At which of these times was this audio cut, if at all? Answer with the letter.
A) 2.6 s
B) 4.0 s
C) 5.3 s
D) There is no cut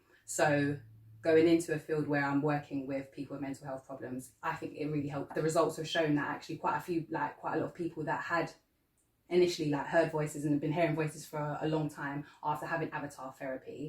C